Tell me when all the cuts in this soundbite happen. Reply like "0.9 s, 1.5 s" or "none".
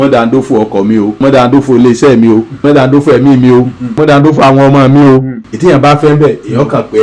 1.2 s, 2.6 s, 4.0 s